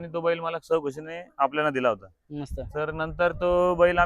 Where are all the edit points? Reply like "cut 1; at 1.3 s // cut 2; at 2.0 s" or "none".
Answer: none